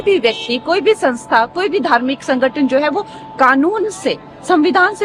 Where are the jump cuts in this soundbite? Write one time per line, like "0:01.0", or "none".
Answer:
none